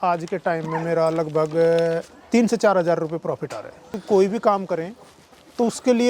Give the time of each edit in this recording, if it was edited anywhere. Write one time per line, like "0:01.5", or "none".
0:03.9